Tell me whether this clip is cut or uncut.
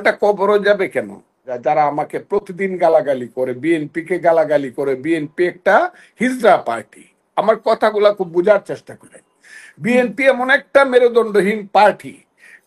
cut